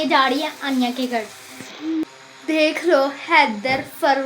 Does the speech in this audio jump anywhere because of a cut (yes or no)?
yes